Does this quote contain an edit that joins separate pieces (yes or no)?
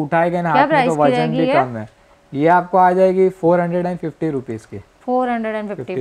no